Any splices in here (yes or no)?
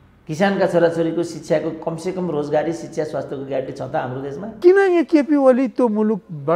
yes